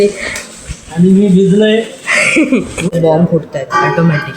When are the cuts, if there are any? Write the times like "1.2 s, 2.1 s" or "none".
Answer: 2.9 s